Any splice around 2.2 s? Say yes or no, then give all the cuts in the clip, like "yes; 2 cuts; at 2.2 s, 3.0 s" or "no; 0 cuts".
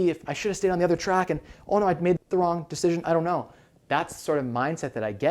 yes; 1 cut; at 2.2 s